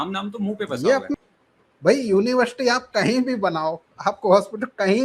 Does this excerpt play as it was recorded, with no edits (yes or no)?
no